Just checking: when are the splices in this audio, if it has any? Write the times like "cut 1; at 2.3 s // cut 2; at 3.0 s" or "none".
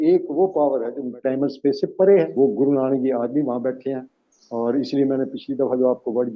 cut 1; at 1.1 s // cut 2; at 2.4 s